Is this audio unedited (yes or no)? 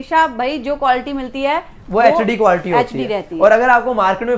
yes